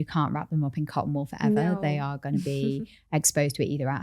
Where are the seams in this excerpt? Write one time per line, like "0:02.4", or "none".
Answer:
none